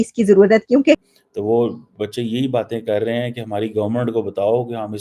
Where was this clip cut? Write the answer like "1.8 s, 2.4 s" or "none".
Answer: 1.1 s